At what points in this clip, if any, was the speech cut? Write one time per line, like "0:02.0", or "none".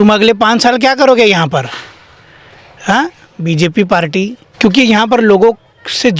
0:04.4